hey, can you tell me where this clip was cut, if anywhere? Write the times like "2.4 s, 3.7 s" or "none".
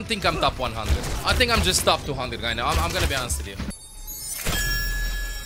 1.1 s, 3.8 s